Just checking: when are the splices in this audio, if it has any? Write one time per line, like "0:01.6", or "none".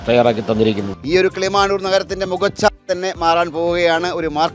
0:00.9

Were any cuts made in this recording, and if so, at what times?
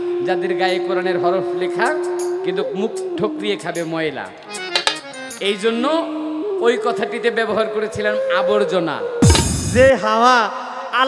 0:09.6

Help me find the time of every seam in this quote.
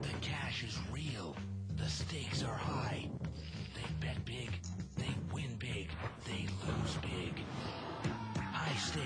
none

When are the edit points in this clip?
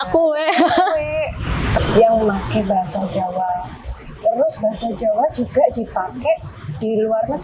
0:01.7

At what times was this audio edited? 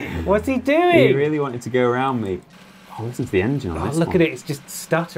0:02.5

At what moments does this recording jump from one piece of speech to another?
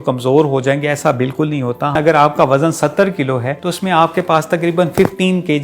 0:02.0
0:03.6

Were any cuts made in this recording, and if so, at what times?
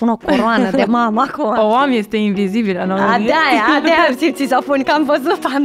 none

